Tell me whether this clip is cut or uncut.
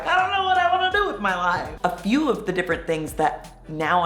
cut